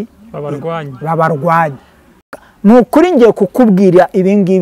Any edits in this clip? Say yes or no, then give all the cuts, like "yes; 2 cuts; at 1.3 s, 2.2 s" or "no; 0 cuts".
yes; 1 cut; at 2.4 s